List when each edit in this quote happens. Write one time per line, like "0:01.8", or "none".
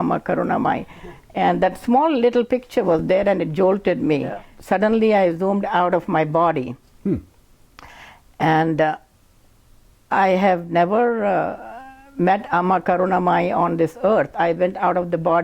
0:04.5